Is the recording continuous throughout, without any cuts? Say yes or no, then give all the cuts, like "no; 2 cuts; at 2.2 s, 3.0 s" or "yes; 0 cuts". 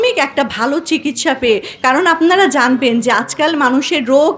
yes; 0 cuts